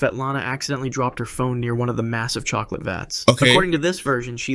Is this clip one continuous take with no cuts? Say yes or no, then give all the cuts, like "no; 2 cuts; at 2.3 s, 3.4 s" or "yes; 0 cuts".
yes; 0 cuts